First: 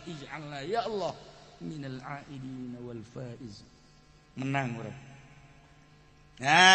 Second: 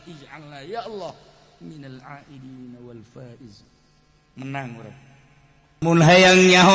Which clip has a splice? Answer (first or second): second